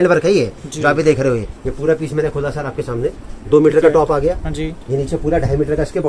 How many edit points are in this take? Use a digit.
1